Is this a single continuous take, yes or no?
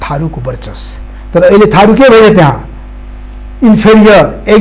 yes